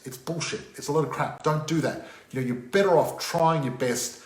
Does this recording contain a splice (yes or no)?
no